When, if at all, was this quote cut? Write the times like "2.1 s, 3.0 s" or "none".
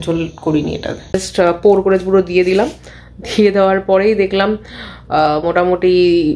1.1 s